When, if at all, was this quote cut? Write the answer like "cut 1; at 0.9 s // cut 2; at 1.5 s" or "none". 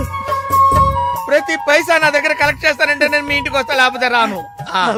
none